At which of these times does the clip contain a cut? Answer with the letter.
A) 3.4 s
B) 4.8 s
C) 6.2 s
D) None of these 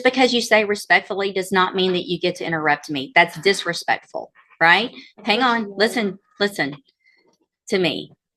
D